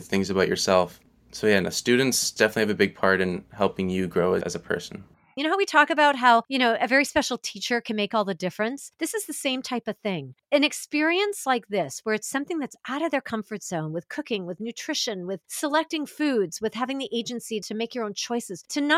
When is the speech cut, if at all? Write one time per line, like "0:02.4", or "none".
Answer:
0:01.0
0:02.3
0:05.3